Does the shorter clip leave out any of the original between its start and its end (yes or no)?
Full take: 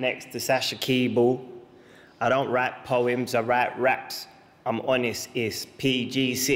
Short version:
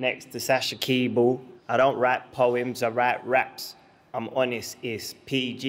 yes